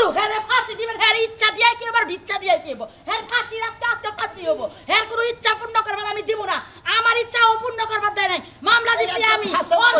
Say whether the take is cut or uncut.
uncut